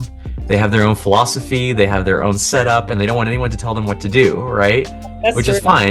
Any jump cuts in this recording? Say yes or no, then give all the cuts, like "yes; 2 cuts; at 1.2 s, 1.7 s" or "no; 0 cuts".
no; 0 cuts